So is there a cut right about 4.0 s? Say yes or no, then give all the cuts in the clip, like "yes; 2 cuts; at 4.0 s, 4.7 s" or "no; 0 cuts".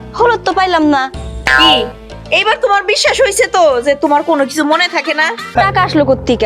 no; 1 cut; at 5.5 s